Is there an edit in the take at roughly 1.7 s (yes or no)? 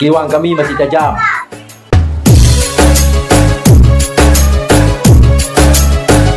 yes